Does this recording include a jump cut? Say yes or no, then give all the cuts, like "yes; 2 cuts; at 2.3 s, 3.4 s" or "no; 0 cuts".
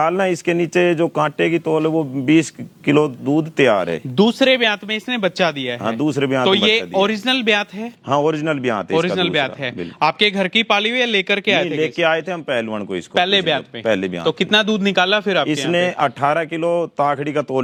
no; 0 cuts